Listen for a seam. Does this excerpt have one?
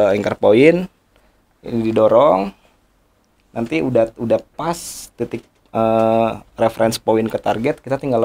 no; 0 cuts

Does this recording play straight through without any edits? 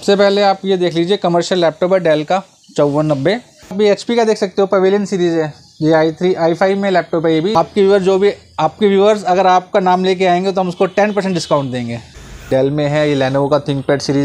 no; 3 cuts; at 3.8 s, 7.5 s, 12.5 s

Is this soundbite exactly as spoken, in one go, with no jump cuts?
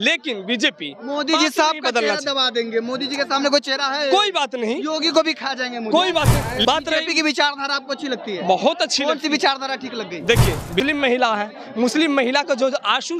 no; 2 cuts; at 6.6 s, 10.8 s

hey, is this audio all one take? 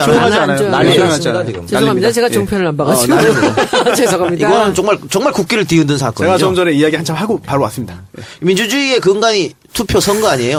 yes; 0 cuts

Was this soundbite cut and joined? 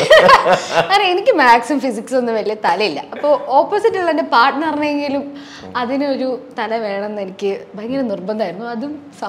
no; 0 cuts

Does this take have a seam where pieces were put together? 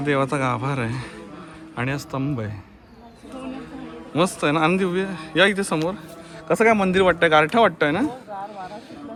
no; 0 cuts

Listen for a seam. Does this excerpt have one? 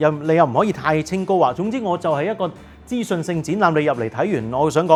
no; 0 cuts

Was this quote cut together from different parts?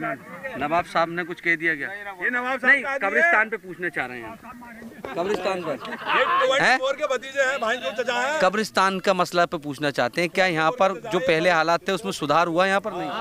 no; 0 cuts

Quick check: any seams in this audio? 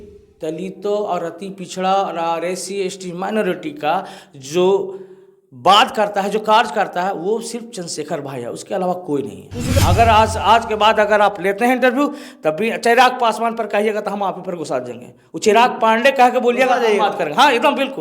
yes; 1 cut; at 9.7 s

